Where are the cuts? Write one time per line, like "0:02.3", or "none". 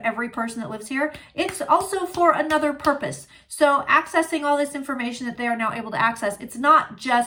none